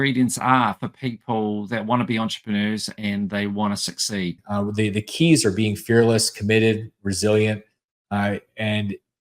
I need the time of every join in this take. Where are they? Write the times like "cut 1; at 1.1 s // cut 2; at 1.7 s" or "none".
cut 1; at 4.4 s